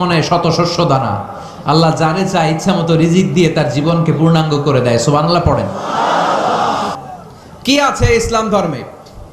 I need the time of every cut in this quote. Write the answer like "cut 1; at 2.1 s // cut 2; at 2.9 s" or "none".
cut 1; at 7.0 s